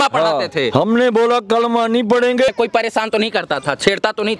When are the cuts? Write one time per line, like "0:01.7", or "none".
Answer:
0:02.5